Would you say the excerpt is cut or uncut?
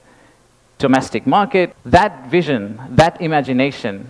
cut